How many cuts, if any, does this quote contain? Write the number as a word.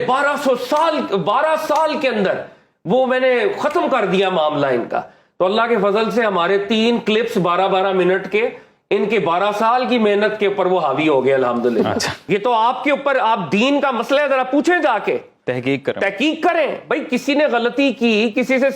one